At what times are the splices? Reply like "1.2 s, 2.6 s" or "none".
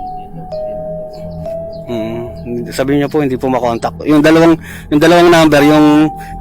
1.9 s

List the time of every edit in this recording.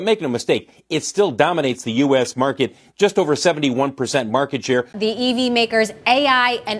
4.9 s

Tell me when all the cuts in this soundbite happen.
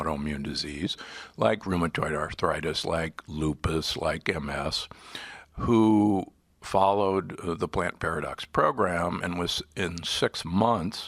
2.3 s

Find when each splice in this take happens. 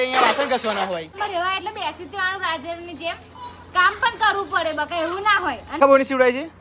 1.1 s, 5.7 s

